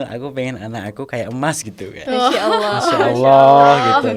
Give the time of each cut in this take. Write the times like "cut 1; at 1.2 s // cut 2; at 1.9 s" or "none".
none